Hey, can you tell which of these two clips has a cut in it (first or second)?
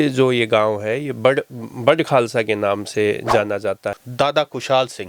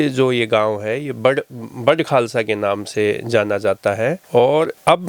first